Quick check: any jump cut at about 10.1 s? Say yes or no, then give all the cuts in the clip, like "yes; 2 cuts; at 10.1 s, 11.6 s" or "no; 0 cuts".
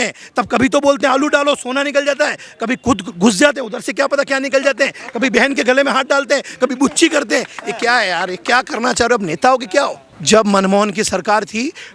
yes; 1 cut; at 10.1 s